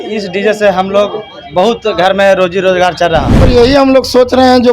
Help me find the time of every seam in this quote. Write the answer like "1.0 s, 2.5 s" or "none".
3.4 s